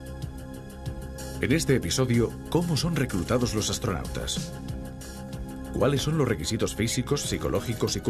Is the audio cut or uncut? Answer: uncut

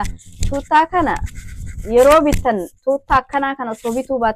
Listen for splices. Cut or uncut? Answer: uncut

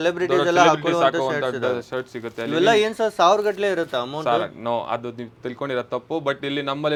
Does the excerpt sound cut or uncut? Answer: uncut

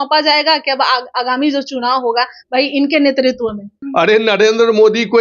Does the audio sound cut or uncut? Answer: cut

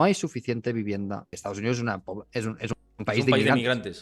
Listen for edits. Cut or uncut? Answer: cut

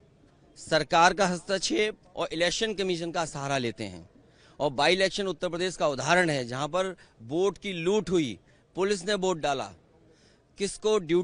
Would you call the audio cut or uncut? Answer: uncut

